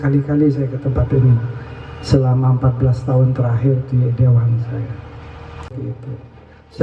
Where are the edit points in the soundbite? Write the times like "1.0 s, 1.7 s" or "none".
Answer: 5.7 s